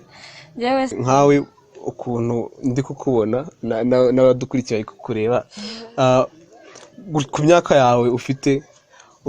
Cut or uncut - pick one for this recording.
cut